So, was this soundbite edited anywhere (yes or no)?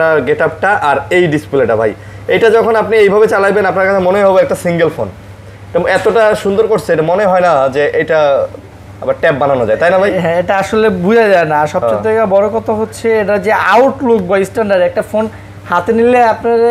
no